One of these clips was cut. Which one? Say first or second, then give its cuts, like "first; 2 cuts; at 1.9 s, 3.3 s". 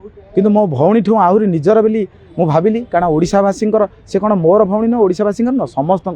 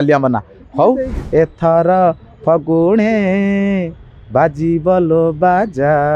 second; 1 cut; at 1.2 s